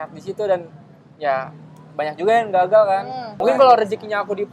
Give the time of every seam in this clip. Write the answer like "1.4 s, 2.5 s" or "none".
3.3 s